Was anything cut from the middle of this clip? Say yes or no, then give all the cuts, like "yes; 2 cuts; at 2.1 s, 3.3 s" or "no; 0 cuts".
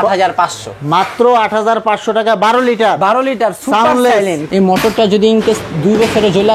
yes; 1 cut; at 4.4 s